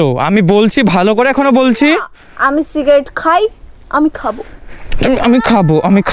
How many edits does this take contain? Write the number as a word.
zero